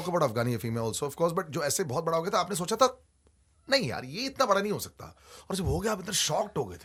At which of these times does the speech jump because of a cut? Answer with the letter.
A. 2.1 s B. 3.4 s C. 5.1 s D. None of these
D